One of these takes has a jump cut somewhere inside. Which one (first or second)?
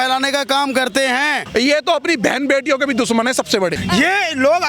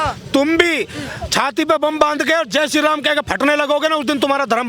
first